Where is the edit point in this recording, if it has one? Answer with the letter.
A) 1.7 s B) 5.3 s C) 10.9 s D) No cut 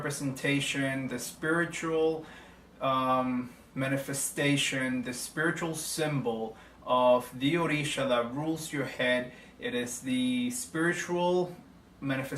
A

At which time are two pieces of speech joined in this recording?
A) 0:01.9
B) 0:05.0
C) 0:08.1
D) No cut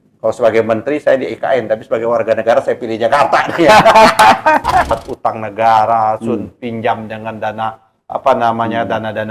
B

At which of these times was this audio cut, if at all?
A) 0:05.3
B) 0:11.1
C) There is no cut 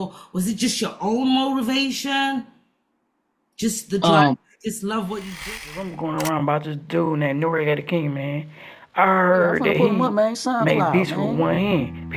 A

